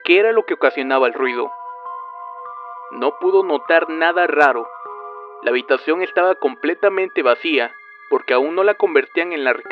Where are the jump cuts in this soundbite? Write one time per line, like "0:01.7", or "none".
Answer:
0:04.1